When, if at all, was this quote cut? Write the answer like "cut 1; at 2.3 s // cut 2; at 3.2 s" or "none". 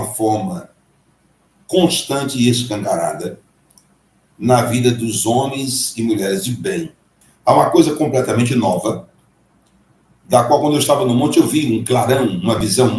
cut 1; at 7.3 s